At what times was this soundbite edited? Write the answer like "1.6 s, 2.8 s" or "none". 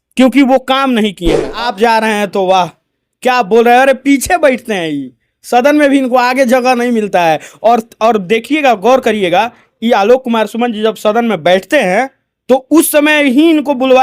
1.5 s